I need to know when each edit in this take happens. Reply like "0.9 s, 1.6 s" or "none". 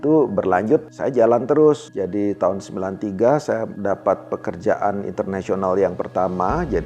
0.9 s, 1.9 s, 3.7 s